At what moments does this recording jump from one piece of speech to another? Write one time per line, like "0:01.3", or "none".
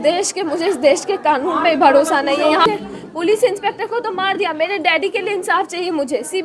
0:02.6